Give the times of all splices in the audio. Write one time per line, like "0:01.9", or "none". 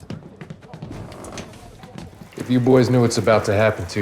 0:02.1